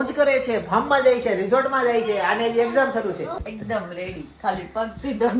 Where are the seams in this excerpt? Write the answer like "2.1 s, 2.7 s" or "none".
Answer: 3.3 s